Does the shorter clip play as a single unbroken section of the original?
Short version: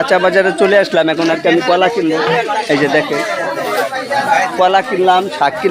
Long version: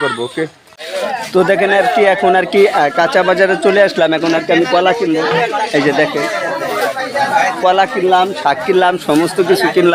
yes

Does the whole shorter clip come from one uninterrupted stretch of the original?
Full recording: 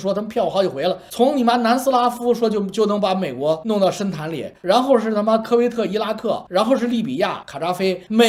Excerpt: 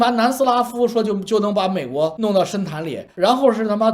yes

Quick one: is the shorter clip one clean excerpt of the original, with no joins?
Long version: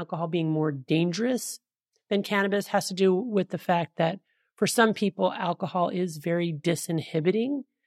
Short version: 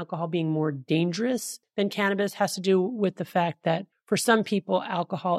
no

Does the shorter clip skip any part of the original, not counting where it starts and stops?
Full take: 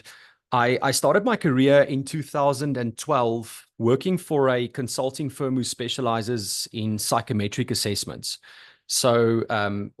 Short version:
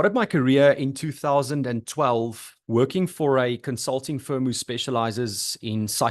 no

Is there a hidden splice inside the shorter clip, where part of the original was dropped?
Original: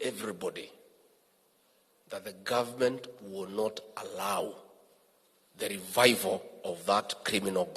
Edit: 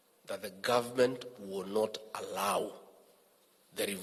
no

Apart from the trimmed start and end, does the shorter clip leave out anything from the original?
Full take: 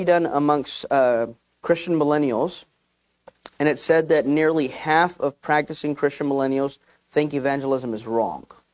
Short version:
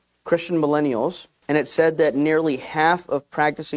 yes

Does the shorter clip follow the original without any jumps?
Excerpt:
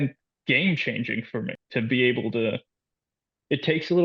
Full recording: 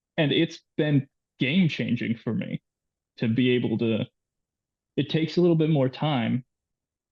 no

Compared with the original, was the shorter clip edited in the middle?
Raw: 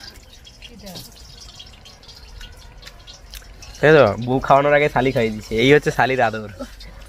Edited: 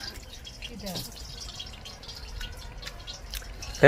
no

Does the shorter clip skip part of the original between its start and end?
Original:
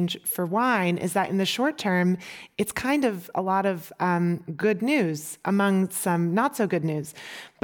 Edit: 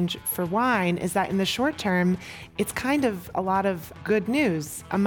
yes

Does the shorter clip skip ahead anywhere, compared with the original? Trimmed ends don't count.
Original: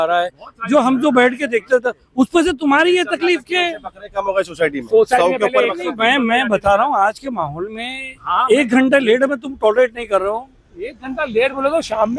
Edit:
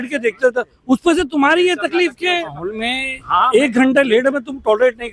yes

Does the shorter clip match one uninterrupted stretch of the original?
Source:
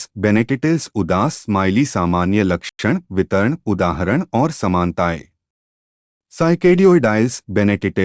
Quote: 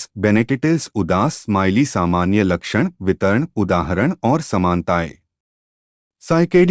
no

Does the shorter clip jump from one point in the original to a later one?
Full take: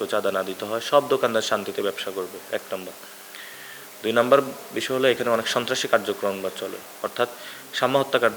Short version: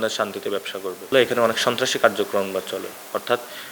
yes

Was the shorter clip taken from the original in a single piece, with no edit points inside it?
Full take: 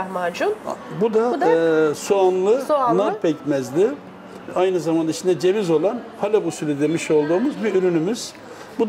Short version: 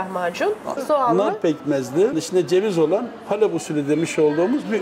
no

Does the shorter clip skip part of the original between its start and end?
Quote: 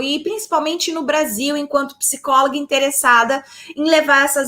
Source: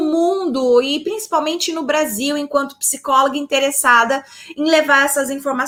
no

